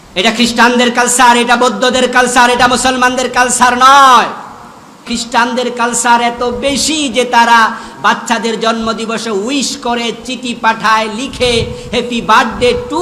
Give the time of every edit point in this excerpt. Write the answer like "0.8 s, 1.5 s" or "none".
5.0 s

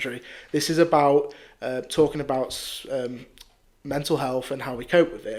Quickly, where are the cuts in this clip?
none

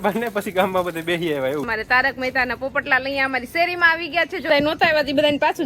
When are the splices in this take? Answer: 1.6 s, 4.5 s

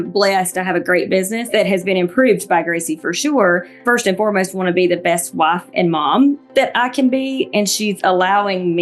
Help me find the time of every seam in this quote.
1.5 s, 3.7 s

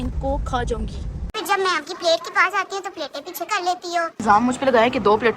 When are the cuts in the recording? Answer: 1.3 s, 4.2 s

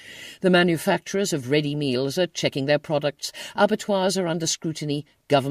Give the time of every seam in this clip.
2.7 s

